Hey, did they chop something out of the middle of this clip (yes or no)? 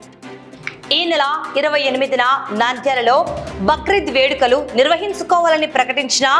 no